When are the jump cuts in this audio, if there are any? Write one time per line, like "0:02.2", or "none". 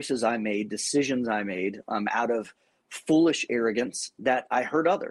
0:04.1